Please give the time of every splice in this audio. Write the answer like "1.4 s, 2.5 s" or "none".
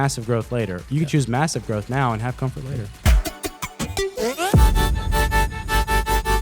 3.1 s

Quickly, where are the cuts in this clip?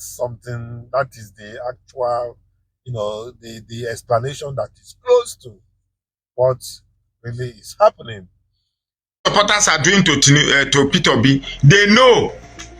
9.2 s

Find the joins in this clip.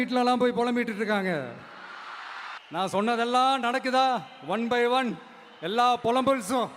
none

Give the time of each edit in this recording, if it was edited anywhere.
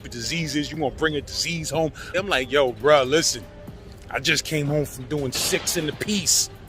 2.1 s

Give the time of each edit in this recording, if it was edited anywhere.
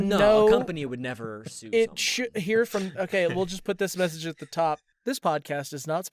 4.9 s

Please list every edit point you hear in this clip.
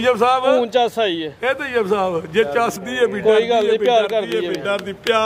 2.8 s

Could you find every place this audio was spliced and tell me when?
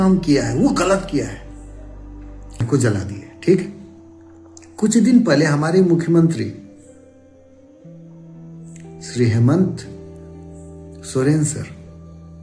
2.6 s

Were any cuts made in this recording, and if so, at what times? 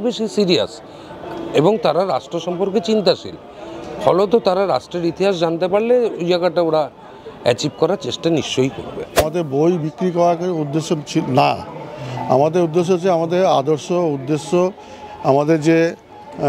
9.2 s

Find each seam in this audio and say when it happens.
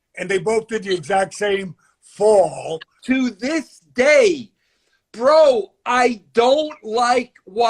2.9 s

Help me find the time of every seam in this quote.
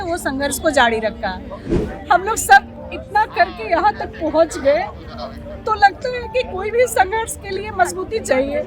1.7 s

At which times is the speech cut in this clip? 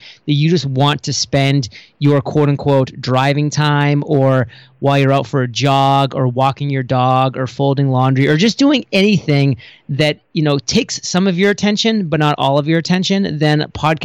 none

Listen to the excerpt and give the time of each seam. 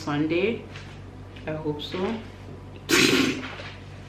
none

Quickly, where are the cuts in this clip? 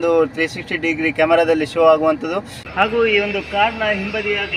2.6 s

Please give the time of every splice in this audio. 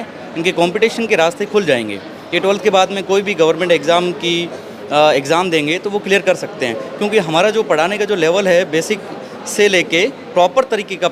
none

